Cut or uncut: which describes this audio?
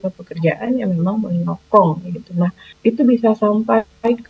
cut